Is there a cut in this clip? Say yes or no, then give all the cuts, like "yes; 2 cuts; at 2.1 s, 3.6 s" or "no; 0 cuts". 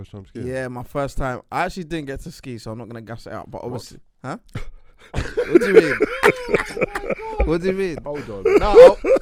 no; 0 cuts